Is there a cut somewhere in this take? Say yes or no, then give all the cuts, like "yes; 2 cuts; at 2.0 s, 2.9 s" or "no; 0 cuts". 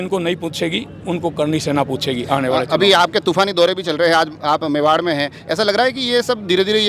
no; 0 cuts